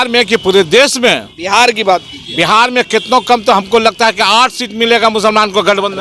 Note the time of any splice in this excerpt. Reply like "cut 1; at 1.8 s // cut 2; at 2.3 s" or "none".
none